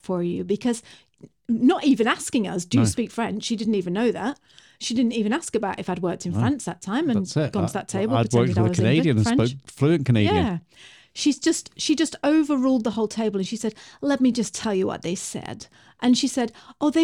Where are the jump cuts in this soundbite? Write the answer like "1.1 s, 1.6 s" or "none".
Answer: none